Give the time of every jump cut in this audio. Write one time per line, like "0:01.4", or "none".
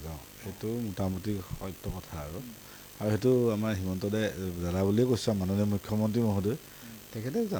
none